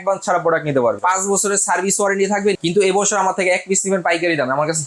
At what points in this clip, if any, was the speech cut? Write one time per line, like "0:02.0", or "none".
0:01.0
0:02.6